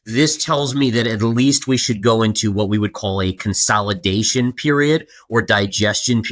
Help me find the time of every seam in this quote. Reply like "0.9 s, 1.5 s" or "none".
none